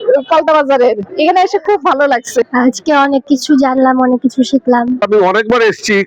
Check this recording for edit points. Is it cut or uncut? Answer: cut